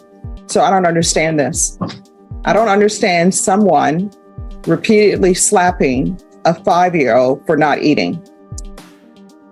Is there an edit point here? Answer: yes; 1 cut; at 8.2 s

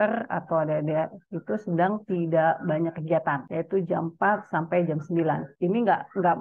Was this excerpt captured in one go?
no; 2 cuts; at 3.5 s, 5.5 s

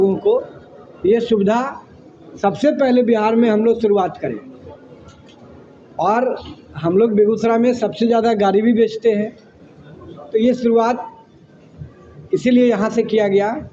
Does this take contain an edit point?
no; 0 cuts

